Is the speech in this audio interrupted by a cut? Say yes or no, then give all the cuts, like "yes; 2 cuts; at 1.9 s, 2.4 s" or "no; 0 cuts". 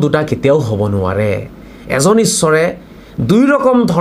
yes; 1 cut; at 1.7 s